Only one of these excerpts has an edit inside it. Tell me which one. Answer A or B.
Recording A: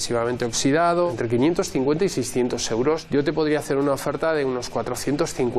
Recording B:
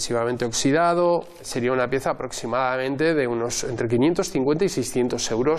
A